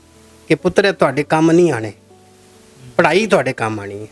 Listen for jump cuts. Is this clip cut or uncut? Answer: uncut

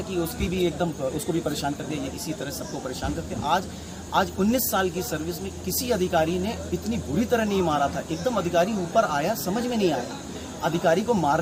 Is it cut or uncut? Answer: uncut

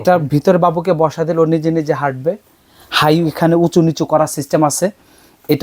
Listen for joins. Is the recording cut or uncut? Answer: uncut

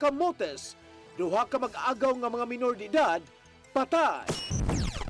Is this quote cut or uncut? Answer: cut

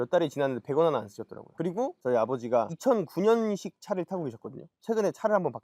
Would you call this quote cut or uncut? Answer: cut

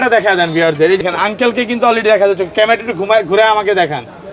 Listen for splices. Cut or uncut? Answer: cut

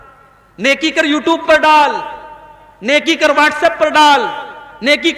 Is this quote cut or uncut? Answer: uncut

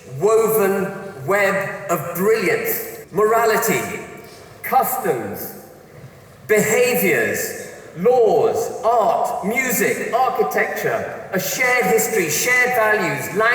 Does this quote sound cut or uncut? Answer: cut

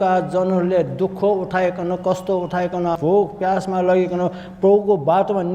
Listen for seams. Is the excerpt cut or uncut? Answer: cut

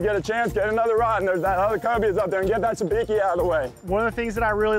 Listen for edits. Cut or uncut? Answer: cut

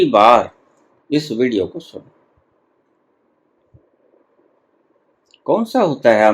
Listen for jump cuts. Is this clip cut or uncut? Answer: cut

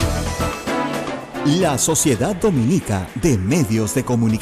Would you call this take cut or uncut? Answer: cut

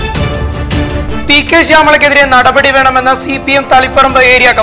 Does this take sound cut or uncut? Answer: cut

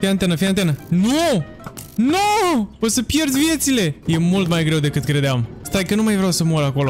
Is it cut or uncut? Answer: cut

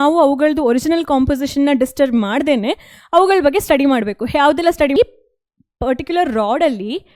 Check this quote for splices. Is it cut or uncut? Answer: cut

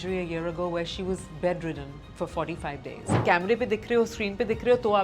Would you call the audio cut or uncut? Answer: cut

